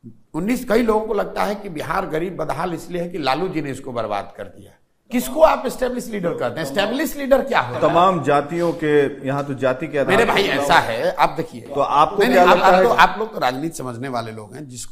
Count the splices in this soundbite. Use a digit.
1